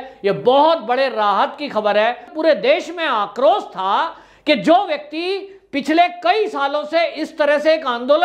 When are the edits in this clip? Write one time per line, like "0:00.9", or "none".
0:02.3